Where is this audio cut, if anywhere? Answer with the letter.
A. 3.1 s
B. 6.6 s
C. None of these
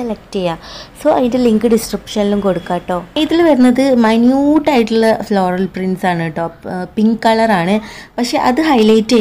A